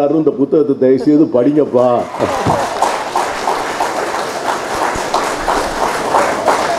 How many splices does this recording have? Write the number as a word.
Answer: zero